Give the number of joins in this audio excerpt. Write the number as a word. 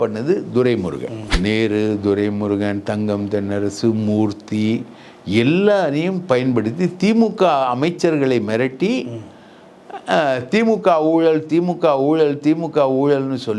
one